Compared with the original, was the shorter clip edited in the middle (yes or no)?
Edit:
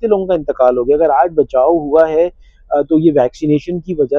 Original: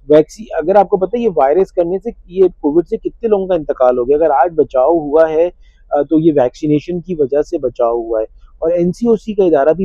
no